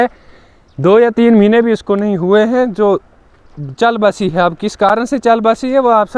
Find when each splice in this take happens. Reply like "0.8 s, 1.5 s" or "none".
none